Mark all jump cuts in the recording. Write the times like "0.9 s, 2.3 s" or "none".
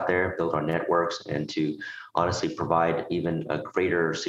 none